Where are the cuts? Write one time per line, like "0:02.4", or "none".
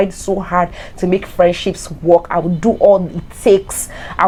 none